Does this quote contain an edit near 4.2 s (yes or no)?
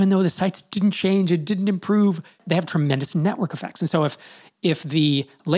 no